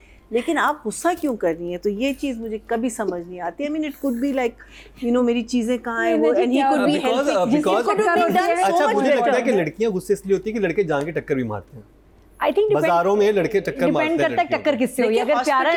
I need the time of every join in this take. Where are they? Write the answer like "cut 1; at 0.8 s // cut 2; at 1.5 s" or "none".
none